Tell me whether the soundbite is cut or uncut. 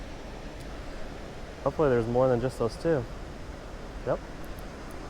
cut